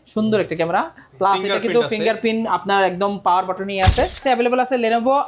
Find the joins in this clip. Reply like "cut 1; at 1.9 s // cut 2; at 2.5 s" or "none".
cut 1; at 4.2 s